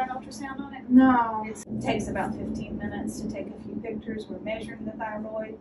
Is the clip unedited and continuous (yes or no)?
no